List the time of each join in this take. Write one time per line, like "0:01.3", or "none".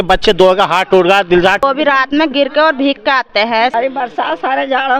0:01.6
0:03.7